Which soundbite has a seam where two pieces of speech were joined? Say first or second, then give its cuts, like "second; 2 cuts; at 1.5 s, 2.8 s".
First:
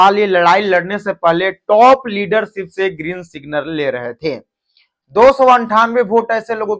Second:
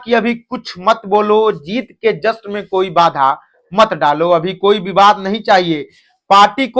first; 1 cut; at 4.9 s